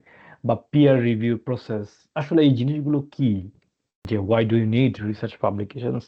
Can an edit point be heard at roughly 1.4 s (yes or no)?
no